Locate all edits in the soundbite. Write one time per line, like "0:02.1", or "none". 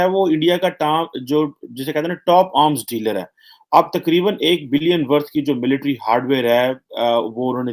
none